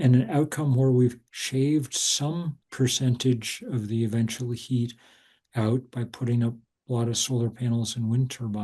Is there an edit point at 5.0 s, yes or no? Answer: no